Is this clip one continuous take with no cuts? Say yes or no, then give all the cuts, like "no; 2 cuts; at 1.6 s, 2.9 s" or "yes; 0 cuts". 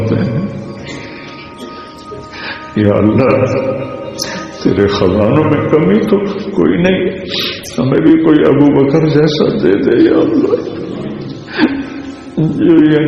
yes; 0 cuts